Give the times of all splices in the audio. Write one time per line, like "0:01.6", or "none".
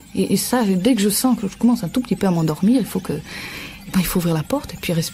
none